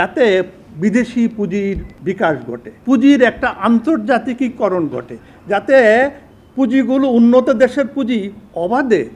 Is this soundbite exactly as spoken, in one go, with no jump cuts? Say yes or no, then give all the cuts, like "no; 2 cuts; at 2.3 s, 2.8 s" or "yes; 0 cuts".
no; 1 cut; at 2.3 s